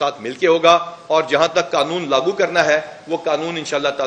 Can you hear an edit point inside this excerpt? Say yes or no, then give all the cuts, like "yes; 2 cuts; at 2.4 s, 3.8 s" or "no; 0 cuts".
no; 0 cuts